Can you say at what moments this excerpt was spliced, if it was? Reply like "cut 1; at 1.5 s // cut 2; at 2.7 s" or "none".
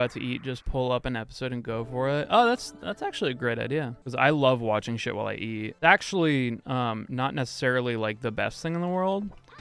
none